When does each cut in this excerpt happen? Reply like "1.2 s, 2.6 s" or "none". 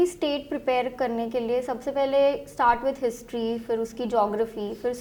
none

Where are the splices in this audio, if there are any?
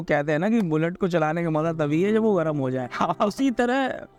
none

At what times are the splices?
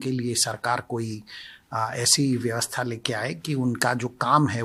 none

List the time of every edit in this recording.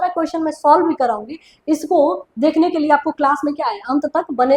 none

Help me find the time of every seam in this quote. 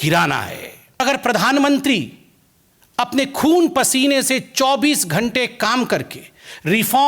1.0 s

